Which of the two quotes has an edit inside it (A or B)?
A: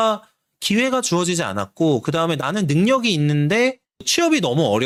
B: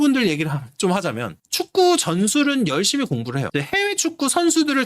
B